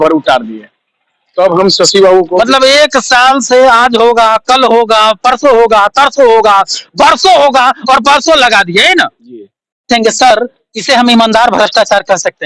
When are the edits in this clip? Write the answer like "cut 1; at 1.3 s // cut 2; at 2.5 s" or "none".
cut 1; at 9.9 s